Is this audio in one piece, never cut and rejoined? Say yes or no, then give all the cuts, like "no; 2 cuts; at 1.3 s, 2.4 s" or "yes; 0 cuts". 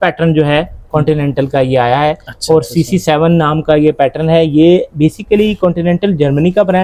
yes; 0 cuts